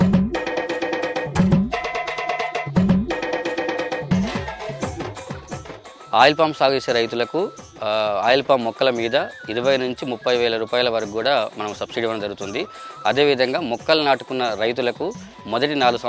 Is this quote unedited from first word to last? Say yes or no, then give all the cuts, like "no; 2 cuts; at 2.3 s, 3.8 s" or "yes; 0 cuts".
no; 2 cuts; at 1.3 s, 4.0 s